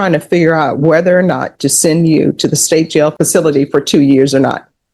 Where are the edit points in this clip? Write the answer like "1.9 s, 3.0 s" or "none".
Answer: 3.1 s